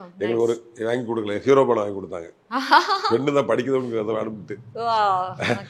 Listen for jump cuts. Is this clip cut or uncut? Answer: uncut